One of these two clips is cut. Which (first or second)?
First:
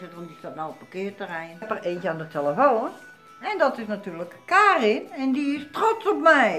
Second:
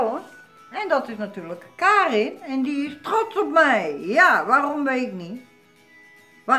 first